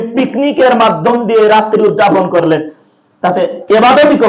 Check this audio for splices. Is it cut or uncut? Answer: uncut